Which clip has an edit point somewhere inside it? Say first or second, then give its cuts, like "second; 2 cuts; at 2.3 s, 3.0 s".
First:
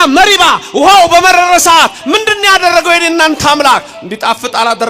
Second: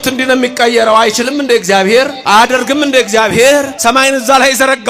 second; 2 cuts; at 2.2 s, 3.7 s